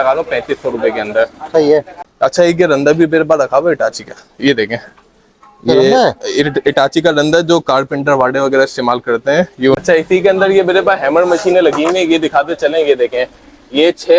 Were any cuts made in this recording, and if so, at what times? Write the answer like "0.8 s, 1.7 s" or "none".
1.9 s, 9.8 s